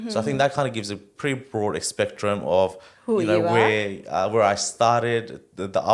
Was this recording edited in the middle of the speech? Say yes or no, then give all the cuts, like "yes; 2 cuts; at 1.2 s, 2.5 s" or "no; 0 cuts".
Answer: no; 0 cuts